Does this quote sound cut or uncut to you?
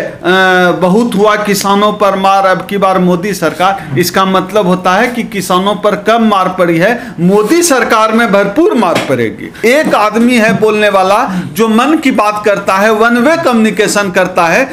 cut